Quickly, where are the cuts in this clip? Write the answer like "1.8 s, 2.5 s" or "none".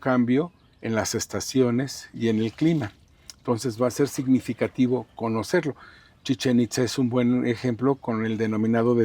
none